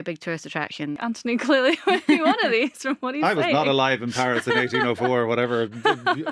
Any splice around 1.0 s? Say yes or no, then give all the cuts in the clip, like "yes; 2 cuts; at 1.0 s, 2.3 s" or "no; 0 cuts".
yes; 1 cut; at 1.0 s